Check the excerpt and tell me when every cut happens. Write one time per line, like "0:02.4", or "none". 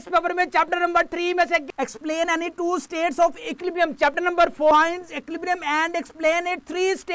0:01.7
0:04.7